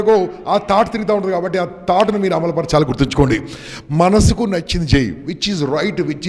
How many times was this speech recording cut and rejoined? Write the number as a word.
zero